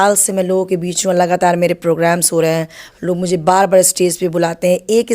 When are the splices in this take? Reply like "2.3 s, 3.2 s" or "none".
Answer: none